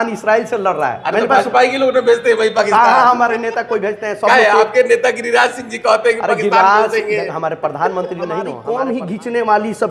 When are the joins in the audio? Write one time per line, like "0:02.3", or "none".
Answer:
0:08.6